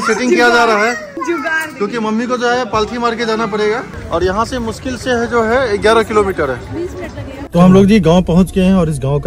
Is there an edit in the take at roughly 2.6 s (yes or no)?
no